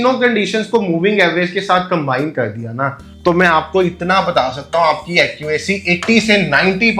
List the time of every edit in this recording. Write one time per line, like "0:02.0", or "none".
none